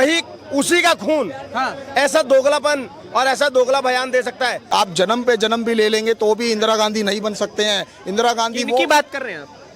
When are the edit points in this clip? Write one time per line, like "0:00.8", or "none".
0:04.6